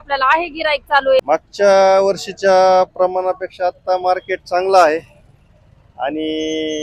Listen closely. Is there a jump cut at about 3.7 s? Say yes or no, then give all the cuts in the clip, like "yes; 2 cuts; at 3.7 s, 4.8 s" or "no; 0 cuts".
no; 1 cut; at 1.2 s